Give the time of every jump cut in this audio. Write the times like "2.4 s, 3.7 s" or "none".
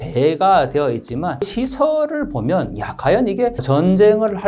1.5 s, 3.6 s